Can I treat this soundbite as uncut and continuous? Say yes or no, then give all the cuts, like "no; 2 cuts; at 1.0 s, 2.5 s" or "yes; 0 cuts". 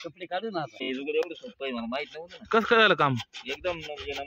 no; 1 cut; at 0.9 s